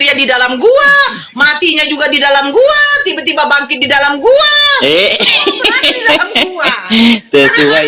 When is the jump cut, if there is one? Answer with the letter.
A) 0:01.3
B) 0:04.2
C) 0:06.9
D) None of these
D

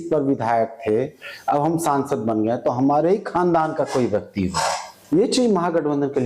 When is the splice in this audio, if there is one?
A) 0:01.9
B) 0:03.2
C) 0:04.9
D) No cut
C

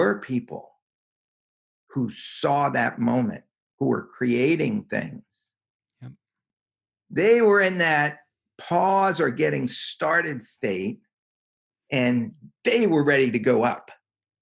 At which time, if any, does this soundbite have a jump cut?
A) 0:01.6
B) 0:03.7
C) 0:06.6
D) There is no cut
C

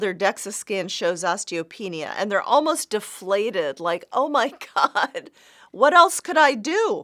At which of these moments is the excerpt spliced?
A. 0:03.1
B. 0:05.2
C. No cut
C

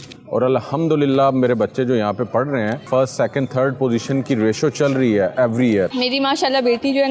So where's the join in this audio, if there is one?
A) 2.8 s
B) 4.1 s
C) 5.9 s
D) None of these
C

